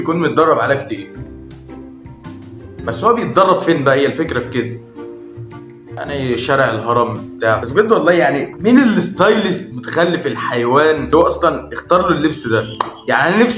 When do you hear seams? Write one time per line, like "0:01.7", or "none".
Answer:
none